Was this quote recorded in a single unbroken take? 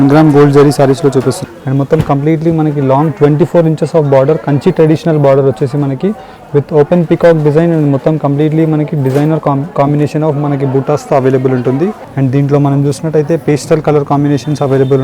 no; 2 cuts; at 1.4 s, 12.0 s

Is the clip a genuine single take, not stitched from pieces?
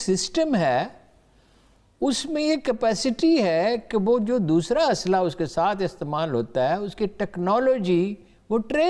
yes; 0 cuts

